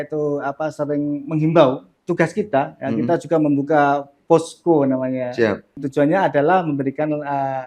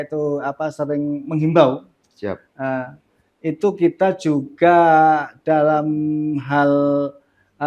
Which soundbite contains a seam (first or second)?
first